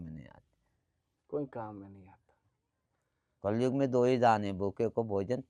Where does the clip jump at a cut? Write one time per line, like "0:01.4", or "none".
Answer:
none